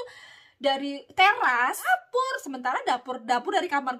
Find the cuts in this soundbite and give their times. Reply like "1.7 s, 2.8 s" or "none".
1.9 s